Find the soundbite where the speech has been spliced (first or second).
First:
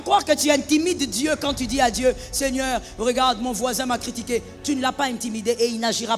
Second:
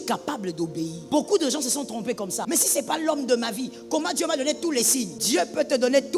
second